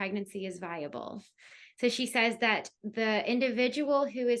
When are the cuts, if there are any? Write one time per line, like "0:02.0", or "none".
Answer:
none